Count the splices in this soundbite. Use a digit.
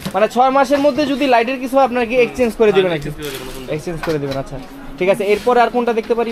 0